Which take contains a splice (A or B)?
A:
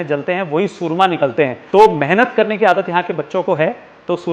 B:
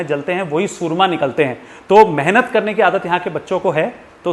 A